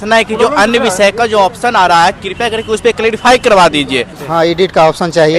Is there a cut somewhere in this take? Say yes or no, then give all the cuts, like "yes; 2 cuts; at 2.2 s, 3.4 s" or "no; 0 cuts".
yes; 1 cut; at 4.2 s